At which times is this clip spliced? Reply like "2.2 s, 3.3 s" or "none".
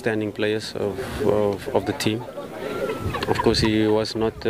none